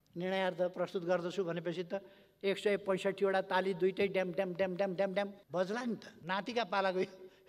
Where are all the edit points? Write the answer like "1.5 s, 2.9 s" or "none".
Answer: 5.4 s, 6.1 s